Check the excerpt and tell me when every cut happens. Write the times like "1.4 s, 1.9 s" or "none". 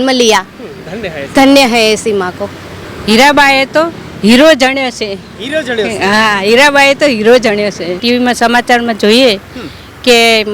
2.9 s, 8.0 s